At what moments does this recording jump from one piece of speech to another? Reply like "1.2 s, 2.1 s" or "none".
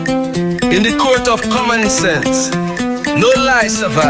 none